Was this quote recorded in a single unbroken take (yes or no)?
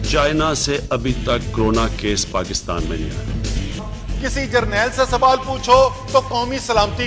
yes